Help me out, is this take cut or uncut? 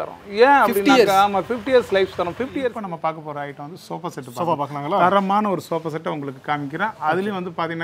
cut